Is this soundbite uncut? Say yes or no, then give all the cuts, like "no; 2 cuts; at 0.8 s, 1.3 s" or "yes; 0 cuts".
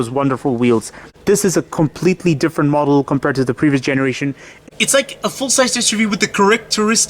no; 2 cuts; at 1.0 s, 4.5 s